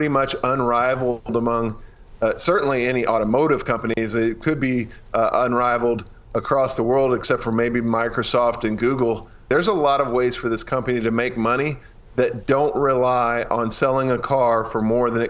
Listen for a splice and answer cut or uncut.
cut